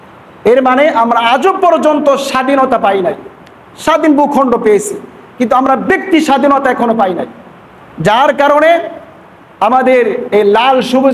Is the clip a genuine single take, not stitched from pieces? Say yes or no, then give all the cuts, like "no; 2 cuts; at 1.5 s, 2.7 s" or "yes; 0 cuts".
yes; 0 cuts